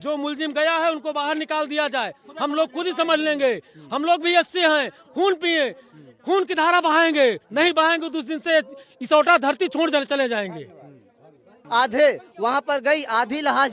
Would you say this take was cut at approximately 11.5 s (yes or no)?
yes